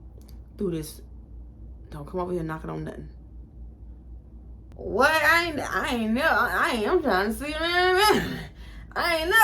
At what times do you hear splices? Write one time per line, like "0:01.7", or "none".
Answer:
0:04.7